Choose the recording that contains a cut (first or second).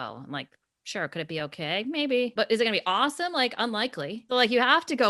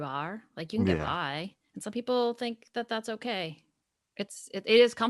first